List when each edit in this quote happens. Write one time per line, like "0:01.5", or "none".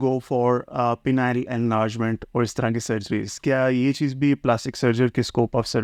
none